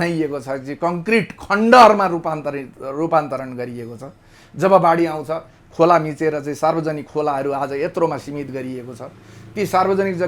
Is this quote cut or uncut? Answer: uncut